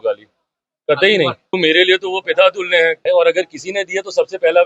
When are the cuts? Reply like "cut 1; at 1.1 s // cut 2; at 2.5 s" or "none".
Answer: cut 1; at 1.6 s // cut 2; at 3.0 s